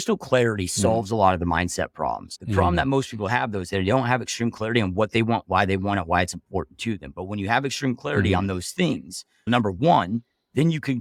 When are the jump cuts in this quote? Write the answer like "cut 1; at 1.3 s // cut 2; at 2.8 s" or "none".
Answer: none